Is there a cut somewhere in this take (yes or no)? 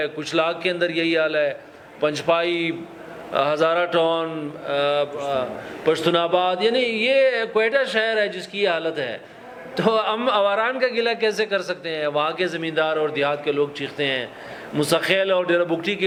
no